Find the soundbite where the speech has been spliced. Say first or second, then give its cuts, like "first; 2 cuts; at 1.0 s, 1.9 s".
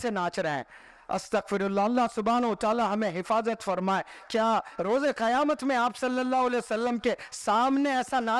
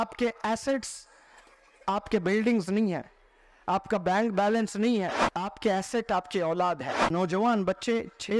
second; 2 cuts; at 5.2 s, 7.1 s